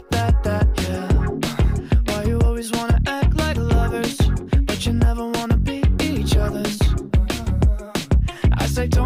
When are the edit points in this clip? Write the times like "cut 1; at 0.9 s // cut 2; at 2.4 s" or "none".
none